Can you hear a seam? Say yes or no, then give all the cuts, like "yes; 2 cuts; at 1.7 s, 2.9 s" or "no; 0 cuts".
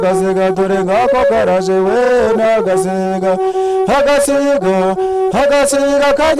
no; 0 cuts